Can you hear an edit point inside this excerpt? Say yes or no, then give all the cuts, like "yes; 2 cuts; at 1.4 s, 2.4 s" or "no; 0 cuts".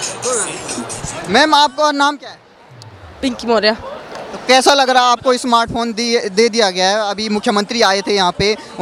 no; 0 cuts